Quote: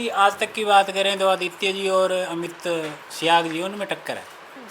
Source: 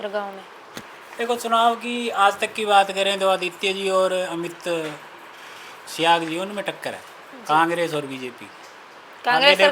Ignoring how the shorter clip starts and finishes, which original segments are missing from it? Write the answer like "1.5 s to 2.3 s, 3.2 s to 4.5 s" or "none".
5.0 s to 5.8 s